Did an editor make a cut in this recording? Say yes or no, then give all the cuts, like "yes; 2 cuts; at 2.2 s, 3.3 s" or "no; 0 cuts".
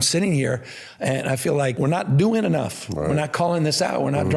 yes; 1 cut; at 1.7 s